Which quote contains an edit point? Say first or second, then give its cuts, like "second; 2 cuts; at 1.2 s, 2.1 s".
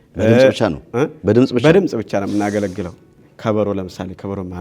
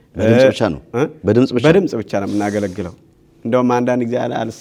first; 1 cut; at 3.2 s